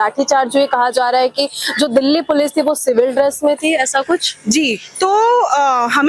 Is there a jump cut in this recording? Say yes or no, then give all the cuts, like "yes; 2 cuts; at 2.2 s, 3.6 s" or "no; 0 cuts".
no; 0 cuts